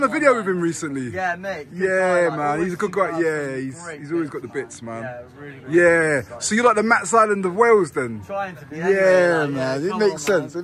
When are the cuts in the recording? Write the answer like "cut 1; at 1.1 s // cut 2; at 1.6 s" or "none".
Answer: none